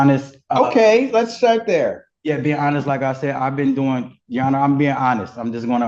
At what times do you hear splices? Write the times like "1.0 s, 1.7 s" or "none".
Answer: none